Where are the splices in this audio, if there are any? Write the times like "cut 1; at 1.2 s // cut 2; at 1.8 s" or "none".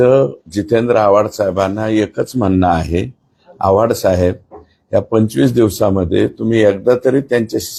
none

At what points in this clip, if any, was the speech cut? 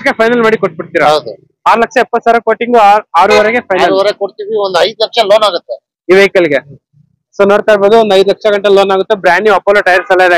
none

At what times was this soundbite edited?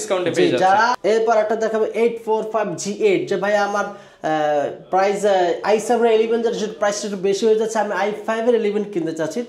cut 1; at 1.0 s

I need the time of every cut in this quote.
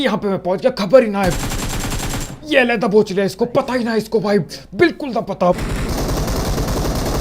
cut 1; at 5.6 s

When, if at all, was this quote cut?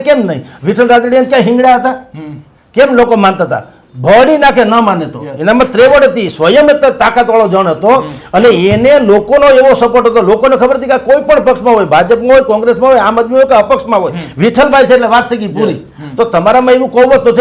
none

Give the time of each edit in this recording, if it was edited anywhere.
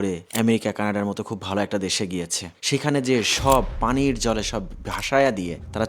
none

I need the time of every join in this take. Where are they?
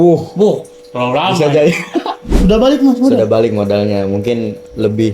cut 1; at 2.3 s

